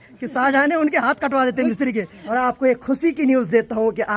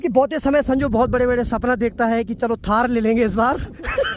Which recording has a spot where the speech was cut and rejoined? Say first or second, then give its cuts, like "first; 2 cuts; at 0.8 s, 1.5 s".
first; 1 cut; at 2.2 s